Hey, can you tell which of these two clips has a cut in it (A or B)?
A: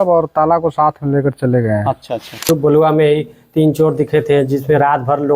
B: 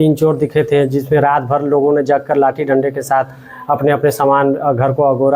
A